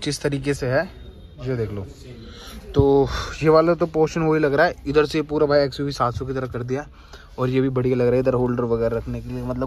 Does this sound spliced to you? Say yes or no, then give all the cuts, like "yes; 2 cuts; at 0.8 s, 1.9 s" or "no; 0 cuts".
no; 0 cuts